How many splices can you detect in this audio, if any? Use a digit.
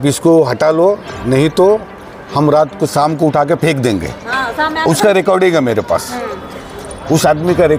0